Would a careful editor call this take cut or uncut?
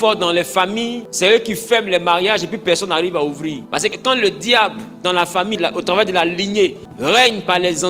cut